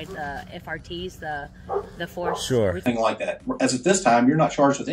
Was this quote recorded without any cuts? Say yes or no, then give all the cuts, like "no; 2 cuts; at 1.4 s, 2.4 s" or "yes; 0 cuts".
no; 1 cut; at 2.8 s